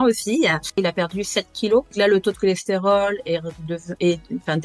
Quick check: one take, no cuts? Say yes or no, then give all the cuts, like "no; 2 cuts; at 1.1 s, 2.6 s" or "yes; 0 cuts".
no; 2 cuts; at 0.8 s, 1.9 s